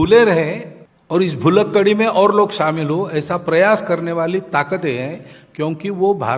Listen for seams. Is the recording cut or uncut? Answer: uncut